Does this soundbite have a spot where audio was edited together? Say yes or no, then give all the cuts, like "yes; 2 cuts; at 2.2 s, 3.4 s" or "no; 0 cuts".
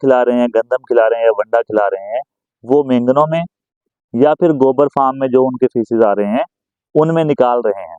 no; 0 cuts